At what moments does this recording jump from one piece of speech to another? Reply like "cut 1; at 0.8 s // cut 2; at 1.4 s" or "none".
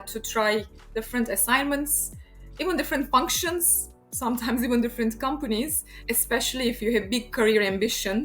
cut 1; at 6.0 s